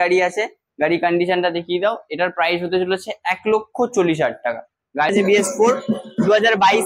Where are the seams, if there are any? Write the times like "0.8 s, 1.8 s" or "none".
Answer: 5.1 s